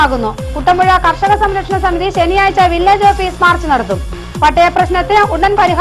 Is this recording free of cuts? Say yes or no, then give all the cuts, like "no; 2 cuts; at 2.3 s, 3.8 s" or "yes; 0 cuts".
yes; 0 cuts